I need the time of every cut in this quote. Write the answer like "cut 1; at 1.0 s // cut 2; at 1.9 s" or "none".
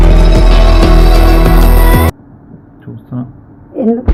none